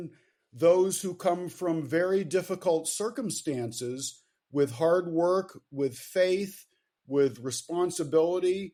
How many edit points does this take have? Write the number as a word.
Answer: zero